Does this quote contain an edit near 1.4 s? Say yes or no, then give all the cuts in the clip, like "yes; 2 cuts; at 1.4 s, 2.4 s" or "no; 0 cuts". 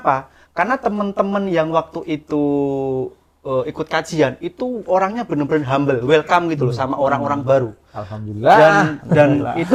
no; 0 cuts